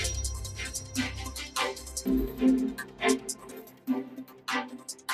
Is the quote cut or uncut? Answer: cut